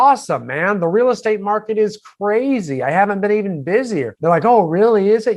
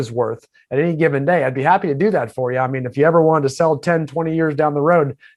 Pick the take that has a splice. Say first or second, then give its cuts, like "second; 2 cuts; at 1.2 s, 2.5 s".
first; 1 cut; at 4.1 s